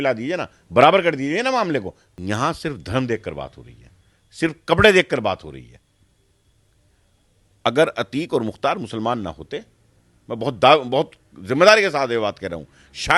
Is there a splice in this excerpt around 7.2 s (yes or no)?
no